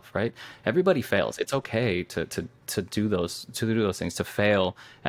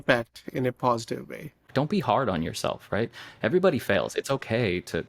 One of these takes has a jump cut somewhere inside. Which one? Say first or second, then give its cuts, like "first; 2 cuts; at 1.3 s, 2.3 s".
second; 1 cut; at 1.7 s